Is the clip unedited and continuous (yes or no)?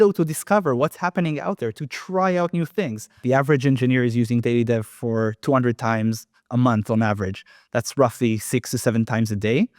no